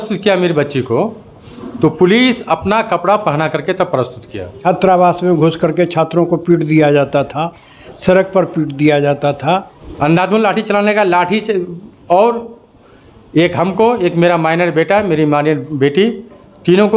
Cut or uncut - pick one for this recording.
cut